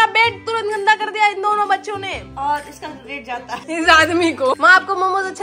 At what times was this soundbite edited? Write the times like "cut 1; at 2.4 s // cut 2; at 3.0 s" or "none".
cut 1; at 4.5 s